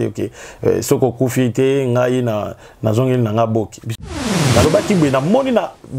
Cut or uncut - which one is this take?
cut